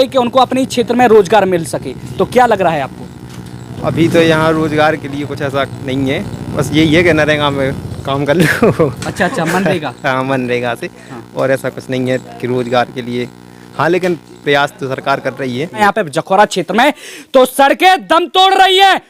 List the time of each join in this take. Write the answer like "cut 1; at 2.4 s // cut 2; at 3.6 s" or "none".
cut 1; at 15.8 s